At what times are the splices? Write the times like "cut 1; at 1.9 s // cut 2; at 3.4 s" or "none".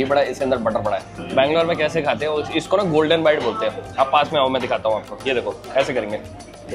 none